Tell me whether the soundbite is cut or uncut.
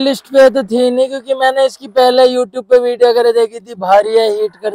uncut